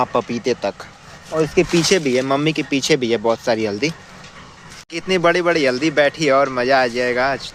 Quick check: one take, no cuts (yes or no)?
yes